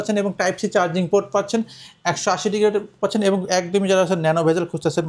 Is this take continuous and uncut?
yes; 0 cuts

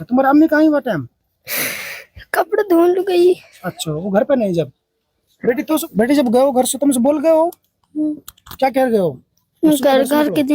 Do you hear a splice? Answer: yes; 1 cut; at 5.8 s

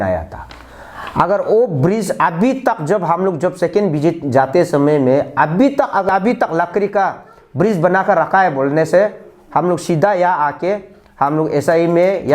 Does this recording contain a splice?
yes; 1 cut; at 6.1 s

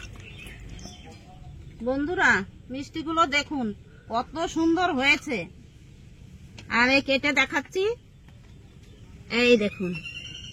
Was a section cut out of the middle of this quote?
yes; 1 cut; at 1.3 s

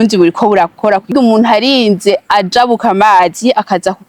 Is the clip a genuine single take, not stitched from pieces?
no; 1 cut; at 1.1 s

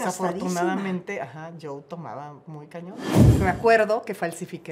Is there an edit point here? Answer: yes; 1 cut; at 3.3 s

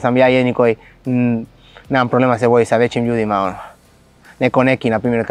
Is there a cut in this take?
no; 0 cuts

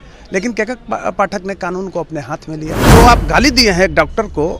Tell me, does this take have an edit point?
yes; 1 cut; at 2.8 s

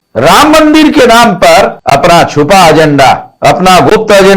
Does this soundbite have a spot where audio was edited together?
yes; 2 cuts; at 1.8 s, 3.3 s

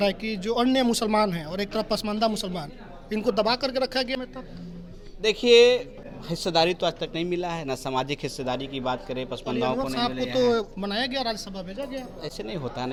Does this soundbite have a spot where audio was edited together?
no; 0 cuts

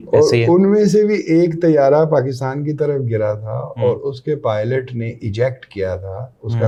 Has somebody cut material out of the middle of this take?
no; 0 cuts

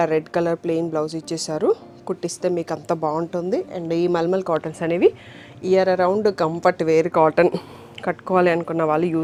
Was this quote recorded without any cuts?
yes; 0 cuts

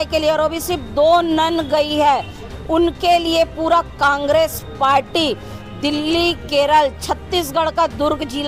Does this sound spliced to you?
no; 0 cuts

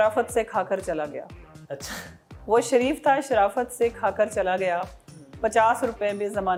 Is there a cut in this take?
no; 0 cuts

